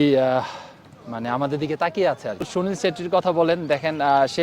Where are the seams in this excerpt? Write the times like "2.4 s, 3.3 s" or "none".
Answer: 2.5 s